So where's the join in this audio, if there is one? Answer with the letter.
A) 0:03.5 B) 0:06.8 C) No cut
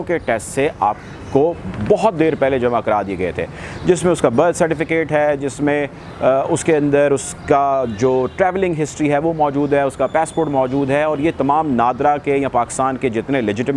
C